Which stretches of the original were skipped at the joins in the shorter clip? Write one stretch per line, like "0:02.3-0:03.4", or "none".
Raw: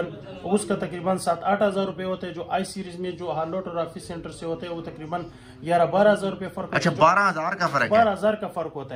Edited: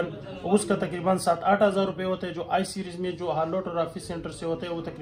none